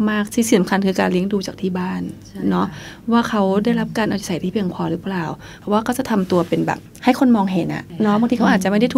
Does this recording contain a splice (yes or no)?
yes